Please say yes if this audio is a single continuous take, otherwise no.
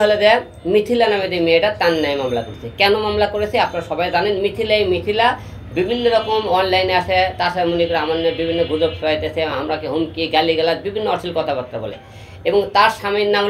yes